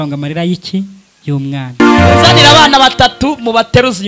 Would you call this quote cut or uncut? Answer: cut